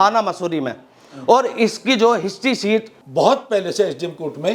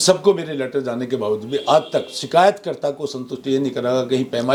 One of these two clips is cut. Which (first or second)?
first